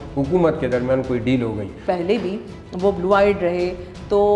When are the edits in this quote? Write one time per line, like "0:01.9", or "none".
0:01.8